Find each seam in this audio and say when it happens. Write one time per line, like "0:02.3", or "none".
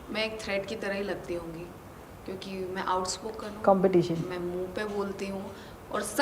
none